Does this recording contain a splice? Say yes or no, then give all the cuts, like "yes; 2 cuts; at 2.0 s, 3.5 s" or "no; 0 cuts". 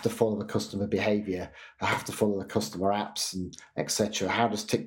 no; 0 cuts